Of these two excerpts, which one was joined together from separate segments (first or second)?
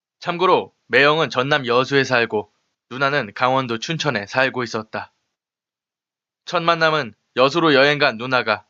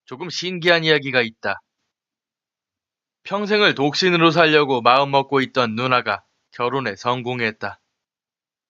second